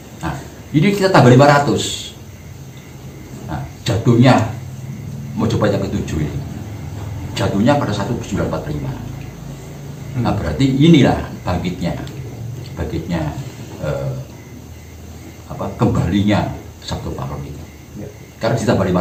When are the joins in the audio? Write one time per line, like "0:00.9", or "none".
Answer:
none